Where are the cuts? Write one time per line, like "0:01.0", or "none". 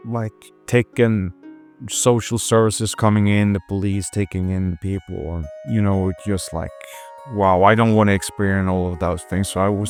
none